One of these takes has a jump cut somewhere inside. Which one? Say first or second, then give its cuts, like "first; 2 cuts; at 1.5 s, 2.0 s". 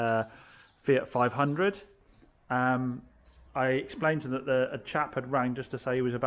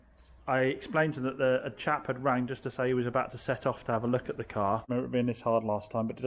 second; 1 cut; at 4.9 s